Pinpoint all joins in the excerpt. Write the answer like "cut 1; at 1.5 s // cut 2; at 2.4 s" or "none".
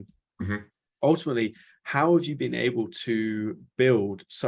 none